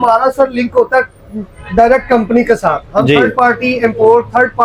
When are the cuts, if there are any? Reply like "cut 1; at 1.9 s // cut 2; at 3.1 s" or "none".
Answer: none